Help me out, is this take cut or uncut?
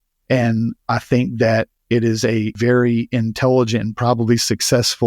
cut